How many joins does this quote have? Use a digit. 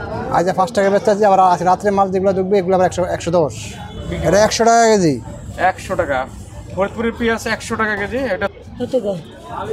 2